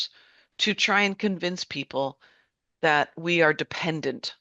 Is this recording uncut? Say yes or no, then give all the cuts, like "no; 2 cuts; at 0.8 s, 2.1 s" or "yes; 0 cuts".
yes; 0 cuts